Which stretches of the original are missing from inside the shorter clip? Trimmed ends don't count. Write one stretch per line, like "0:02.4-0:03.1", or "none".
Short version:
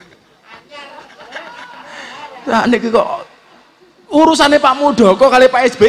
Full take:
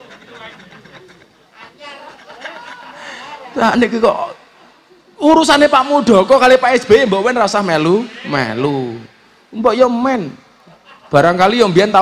none